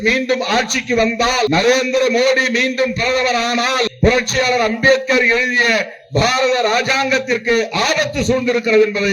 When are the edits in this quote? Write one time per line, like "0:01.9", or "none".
0:01.5
0:03.9